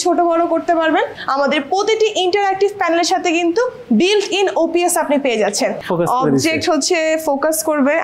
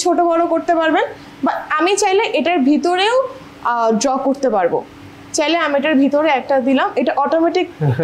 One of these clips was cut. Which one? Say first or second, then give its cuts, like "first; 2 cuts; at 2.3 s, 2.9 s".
first; 2 cuts; at 1.2 s, 5.8 s